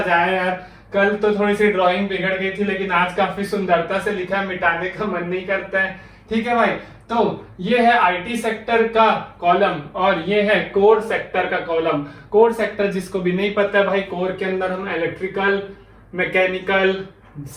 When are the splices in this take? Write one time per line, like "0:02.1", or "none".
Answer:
none